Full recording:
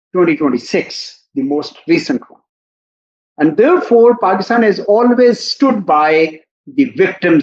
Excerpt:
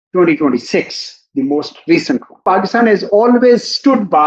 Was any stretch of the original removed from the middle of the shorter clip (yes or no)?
yes